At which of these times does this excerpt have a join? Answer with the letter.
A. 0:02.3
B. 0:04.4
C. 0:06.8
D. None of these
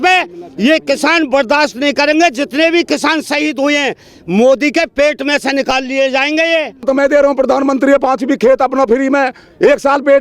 C